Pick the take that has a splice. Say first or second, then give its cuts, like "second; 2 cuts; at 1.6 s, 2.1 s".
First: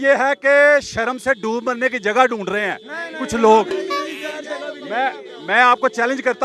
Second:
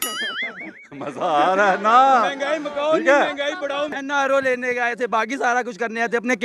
second; 1 cut; at 4.0 s